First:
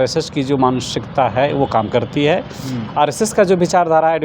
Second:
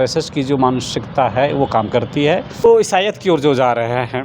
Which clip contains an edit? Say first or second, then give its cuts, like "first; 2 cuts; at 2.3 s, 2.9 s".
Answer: second; 1 cut; at 2.6 s